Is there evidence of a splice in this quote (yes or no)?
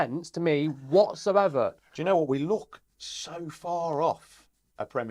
yes